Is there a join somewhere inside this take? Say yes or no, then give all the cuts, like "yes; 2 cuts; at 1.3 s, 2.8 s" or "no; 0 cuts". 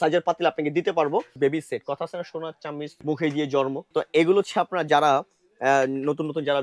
yes; 3 cuts; at 1.4 s, 3.0 s, 3.8 s